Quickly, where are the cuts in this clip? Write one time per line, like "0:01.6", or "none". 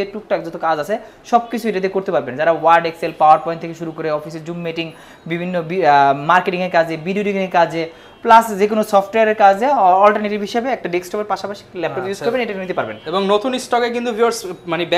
none